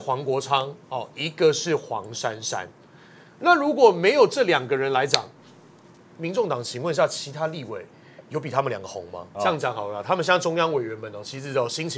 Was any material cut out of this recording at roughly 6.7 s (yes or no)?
no